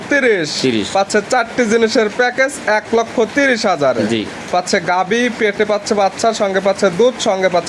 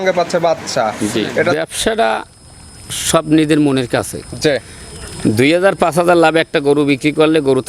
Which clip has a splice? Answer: second; 1 cut; at 1.6 s

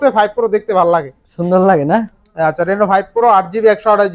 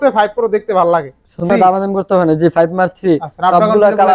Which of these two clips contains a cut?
second; 1 cut; at 1.5 s

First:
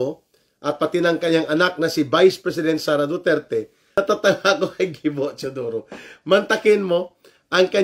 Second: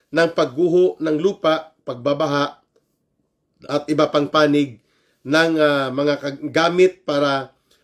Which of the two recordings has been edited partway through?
first; 1 cut; at 3.8 s

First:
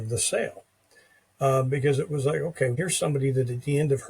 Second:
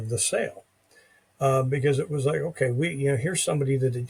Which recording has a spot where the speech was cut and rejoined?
first; 1 cut; at 2.7 s

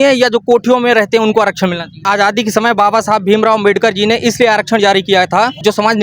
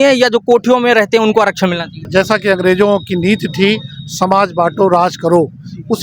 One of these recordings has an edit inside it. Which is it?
first; 1 cut; at 2.0 s

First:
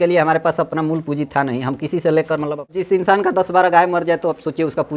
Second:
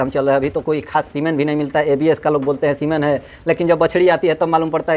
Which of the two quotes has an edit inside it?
first; 1 cut; at 2.8 s

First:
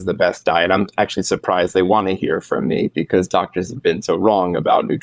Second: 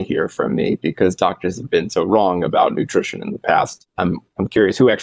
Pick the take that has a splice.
second; 1 cut; at 3.8 s

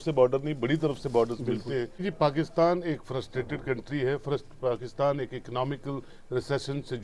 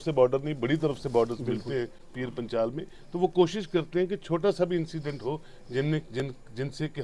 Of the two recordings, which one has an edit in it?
first; 1 cut; at 2.0 s

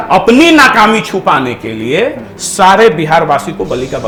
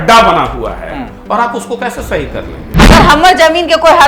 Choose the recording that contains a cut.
second; 1 cut; at 2.9 s

